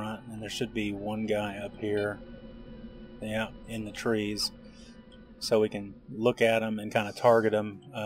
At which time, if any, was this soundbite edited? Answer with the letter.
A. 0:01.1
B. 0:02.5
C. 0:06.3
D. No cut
D